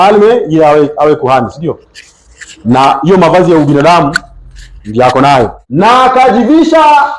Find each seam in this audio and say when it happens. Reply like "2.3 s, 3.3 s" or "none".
5.6 s